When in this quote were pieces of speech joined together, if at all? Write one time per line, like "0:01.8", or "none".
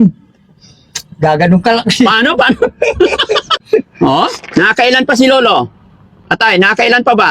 0:03.6